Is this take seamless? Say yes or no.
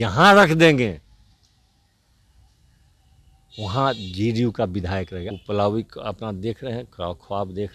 no